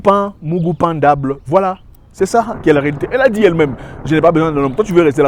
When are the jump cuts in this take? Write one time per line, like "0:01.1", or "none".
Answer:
none